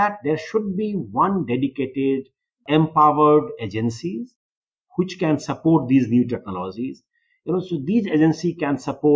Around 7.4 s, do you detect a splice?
no; 1 cut; at 2.6 s

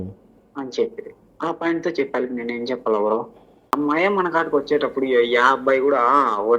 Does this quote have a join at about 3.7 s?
yes; 1 cut; at 3.7 s

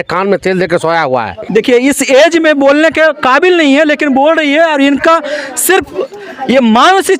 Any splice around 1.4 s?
yes; 1 cut; at 1.4 s

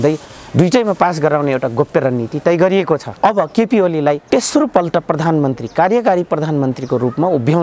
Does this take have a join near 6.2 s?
no; 2 cuts; at 3.1 s, 4.2 s

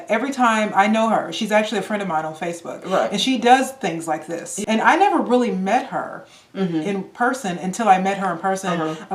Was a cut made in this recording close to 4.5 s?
yes; 1 cut; at 4.5 s

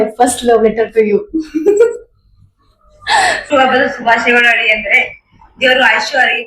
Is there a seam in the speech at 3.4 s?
yes; 1 cut; at 3.4 s

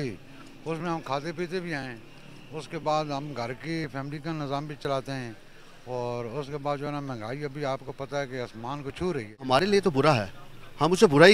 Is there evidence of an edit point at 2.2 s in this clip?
no; 1 cut; at 9.4 s

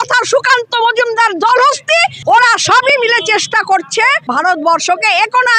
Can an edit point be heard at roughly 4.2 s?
yes; 2 cuts; at 2.1 s, 4.2 s

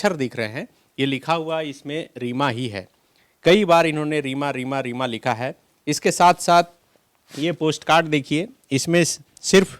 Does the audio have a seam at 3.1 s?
no; 0 cuts

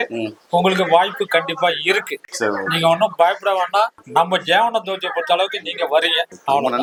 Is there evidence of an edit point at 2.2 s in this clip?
no; 0 cuts

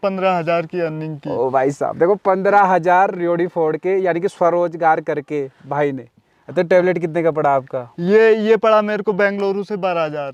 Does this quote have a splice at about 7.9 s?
no; 0 cuts

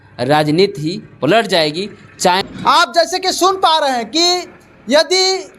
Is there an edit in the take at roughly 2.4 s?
yes; 1 cut; at 2.4 s

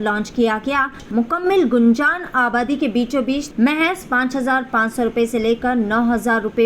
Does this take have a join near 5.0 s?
no; 2 cuts; at 1.0 s, 3.5 s

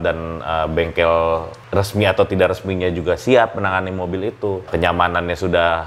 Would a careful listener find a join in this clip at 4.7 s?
yes; 2 cuts; at 1.6 s, 4.7 s

